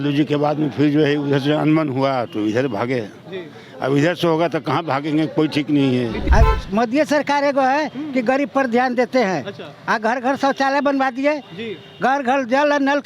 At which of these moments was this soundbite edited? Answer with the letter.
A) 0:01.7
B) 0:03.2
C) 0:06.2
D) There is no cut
C